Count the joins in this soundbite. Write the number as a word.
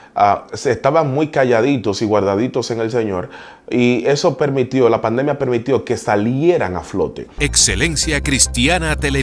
one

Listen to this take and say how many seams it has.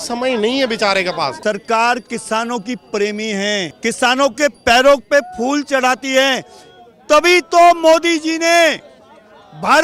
two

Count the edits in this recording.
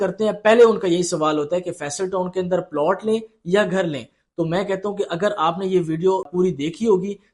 one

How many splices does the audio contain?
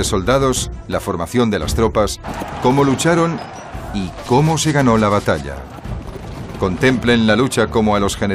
one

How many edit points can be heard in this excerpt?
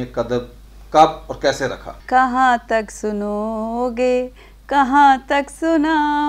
one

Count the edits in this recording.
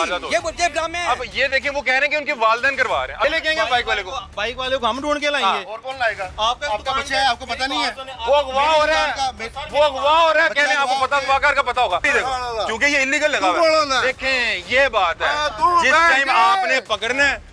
two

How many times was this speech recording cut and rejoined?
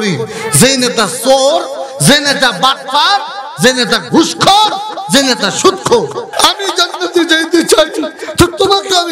one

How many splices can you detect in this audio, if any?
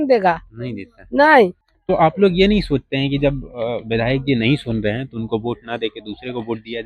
one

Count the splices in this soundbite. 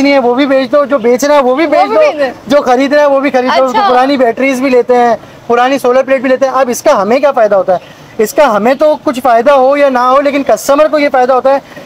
zero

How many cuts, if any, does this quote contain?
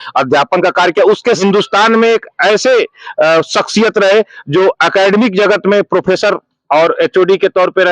one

